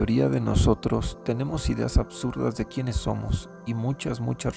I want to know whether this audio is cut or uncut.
cut